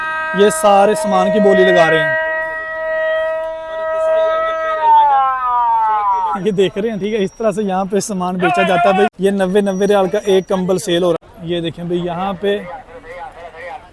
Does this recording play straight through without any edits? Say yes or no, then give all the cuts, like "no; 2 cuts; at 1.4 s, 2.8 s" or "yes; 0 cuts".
no; 2 cuts; at 9.1 s, 11.2 s